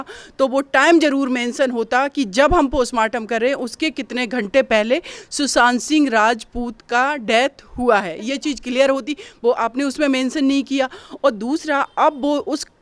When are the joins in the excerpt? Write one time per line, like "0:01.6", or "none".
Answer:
none